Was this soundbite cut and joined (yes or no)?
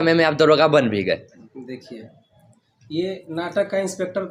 no